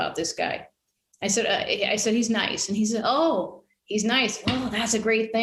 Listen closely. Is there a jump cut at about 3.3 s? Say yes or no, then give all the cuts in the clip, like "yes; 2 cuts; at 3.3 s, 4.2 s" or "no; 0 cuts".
no; 0 cuts